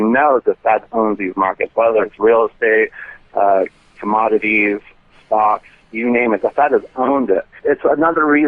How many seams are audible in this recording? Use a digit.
1